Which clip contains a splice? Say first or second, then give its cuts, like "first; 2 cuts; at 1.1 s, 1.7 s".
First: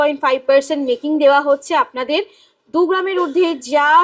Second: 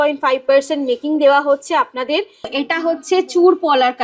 second; 1 cut; at 2.5 s